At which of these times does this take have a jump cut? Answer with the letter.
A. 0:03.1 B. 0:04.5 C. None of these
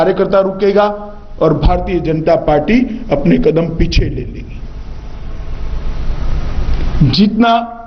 C